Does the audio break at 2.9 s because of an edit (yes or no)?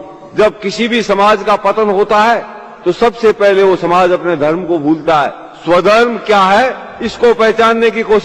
no